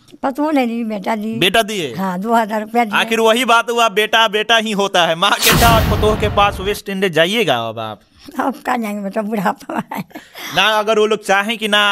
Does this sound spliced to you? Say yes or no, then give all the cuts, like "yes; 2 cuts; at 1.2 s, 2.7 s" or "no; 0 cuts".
yes; 1 cut; at 5.6 s